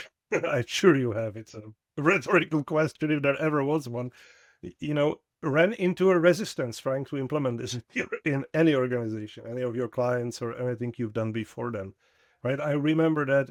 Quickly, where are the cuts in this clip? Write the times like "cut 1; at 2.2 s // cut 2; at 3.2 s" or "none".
none